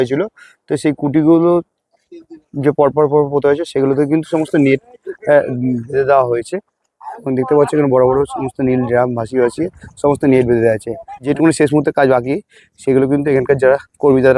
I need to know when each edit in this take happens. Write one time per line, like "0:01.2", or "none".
0:11.2